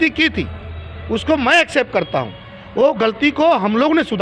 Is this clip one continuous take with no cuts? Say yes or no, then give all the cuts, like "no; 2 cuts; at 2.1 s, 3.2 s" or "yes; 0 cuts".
yes; 0 cuts